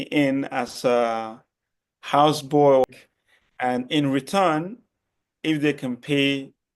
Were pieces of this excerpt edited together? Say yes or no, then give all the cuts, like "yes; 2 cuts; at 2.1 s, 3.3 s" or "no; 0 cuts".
yes; 1 cut; at 2.8 s